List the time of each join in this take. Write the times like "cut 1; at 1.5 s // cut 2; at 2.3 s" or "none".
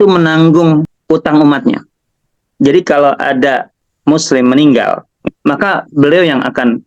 cut 1; at 0.9 s // cut 2; at 3.8 s // cut 3; at 5.2 s